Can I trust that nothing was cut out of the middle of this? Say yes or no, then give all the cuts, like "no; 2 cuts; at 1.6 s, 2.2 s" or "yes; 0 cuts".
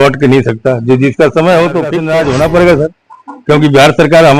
no; 1 cut; at 2.0 s